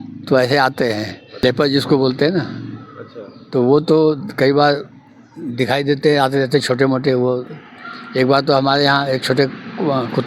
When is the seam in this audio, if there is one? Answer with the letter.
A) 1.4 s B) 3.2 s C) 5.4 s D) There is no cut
A